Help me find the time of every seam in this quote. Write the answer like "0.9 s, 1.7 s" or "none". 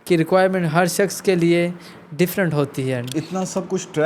3.0 s